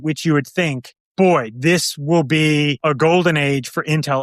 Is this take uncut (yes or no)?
no